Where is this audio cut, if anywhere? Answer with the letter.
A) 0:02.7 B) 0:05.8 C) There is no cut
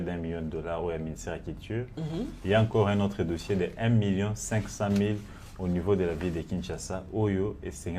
C